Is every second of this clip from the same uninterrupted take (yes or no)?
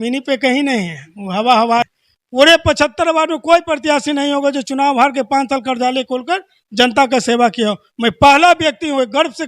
no